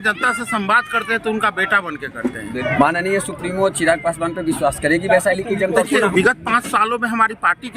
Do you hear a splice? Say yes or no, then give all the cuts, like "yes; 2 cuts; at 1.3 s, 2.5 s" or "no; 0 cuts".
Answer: yes; 2 cuts; at 2.6 s, 6.1 s